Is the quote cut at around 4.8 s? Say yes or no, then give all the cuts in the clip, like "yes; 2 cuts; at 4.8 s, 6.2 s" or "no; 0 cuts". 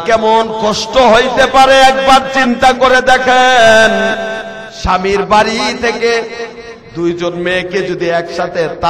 no; 0 cuts